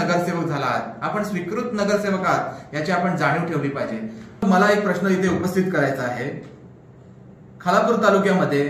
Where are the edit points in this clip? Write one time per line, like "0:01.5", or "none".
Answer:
0:04.4